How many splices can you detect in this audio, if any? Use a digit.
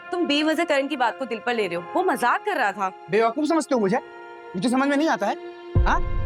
0